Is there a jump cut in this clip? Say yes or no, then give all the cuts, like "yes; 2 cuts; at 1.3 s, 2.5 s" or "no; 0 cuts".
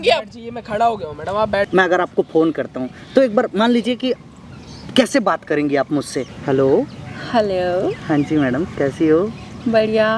yes; 2 cuts; at 1.7 s, 6.3 s